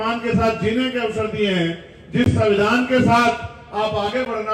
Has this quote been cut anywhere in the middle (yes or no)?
no